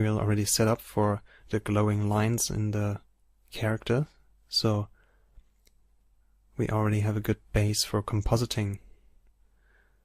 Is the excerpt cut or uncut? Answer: cut